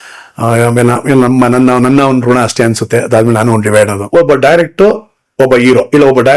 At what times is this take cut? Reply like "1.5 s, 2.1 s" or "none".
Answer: 4.0 s